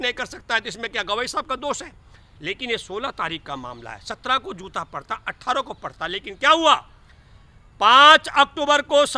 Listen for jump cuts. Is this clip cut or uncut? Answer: uncut